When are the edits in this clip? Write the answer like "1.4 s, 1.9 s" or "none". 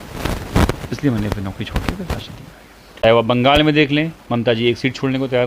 3.0 s